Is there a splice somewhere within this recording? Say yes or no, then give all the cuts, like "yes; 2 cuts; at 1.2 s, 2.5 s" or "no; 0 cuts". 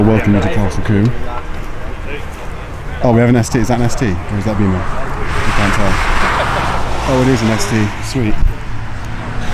no; 0 cuts